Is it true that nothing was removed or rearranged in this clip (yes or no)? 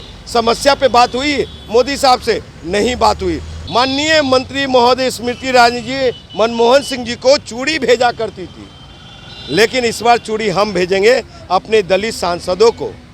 no